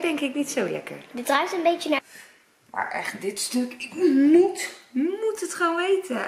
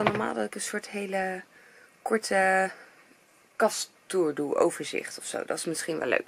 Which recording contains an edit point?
first; 1 cut; at 2.0 s

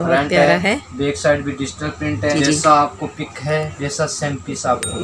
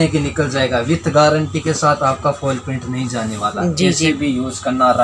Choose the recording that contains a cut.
first; 1 cut; at 2.3 s

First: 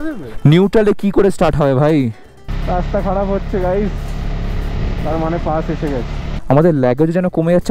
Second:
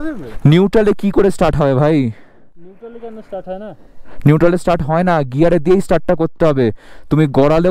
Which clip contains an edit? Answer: first; 2 cuts; at 2.5 s, 6.4 s

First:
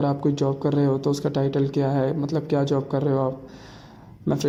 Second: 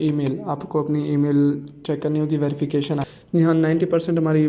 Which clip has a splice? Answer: second; 1 cut; at 3.0 s

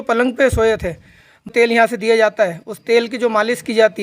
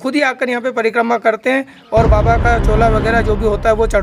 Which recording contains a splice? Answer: first; 1 cut; at 1.5 s

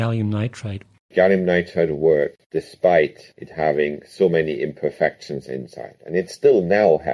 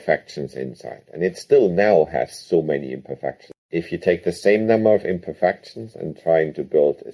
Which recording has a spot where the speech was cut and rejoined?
first; 2 cuts; at 1.1 s, 2.4 s

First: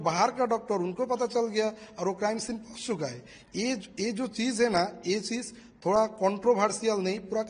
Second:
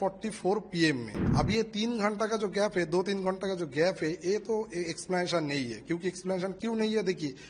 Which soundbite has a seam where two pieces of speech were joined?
second; 1 cut; at 1.2 s

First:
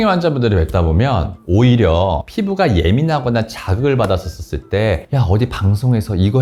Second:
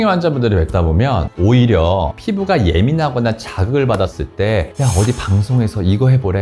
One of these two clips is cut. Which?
second; 2 cuts; at 1.3 s, 4.2 s

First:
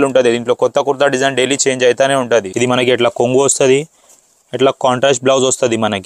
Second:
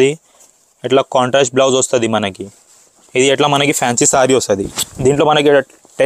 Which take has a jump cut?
first; 1 cut; at 2.5 s

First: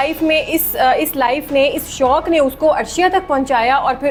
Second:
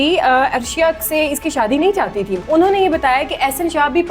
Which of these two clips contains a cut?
second; 1 cut; at 2.4 s

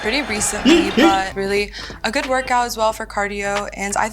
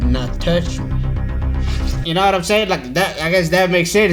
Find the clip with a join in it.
first; 1 cut; at 1.3 s

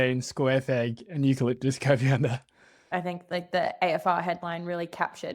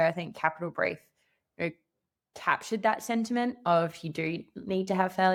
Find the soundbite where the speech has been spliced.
first; 1 cut; at 2.9 s

